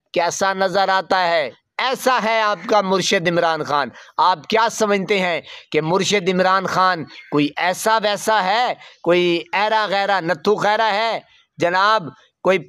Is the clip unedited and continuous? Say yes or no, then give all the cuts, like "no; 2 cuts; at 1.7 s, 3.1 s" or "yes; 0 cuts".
no; 1 cut; at 1.6 s